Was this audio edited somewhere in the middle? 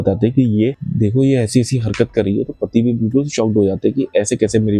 no; 0 cuts

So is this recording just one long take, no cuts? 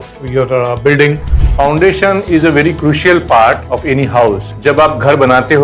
no; 3 cuts; at 1.3 s, 3.6 s, 4.5 s

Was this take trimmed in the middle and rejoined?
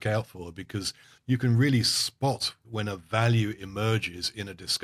yes; 2 cuts; at 1.1 s, 2.6 s

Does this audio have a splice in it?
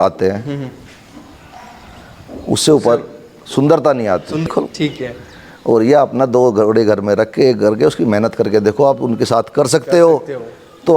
yes; 1 cut; at 4.5 s

